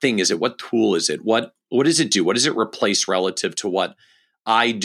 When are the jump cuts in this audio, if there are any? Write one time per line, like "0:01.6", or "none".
none